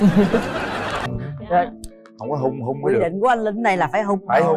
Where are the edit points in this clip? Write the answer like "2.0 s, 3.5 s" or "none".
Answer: 1.1 s